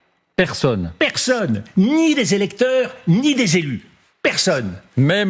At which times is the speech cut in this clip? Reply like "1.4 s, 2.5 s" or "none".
none